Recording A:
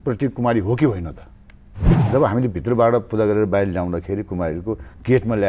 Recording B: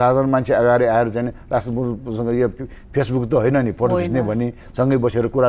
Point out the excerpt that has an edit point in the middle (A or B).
A